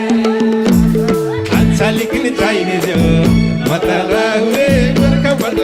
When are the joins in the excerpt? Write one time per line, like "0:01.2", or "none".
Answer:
none